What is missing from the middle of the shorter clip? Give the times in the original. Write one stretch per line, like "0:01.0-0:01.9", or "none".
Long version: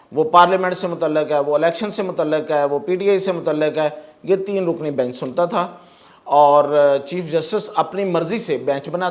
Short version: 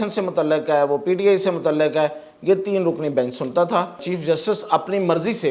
0:05.9-0:07.1